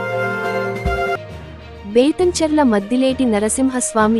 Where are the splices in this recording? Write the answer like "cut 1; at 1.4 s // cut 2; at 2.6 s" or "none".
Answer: cut 1; at 1.1 s